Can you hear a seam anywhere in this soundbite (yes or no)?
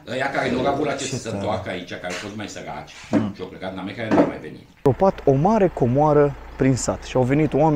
yes